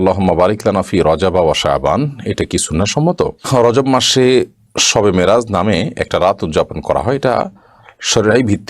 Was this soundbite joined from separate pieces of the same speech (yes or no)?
yes